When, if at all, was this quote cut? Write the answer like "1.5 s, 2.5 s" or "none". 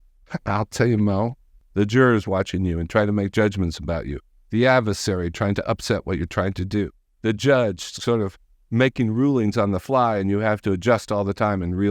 1.6 s